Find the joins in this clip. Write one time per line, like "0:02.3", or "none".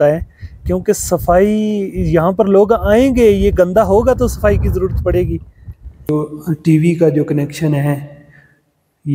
0:06.1